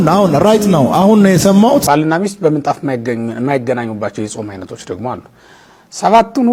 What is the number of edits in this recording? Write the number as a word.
one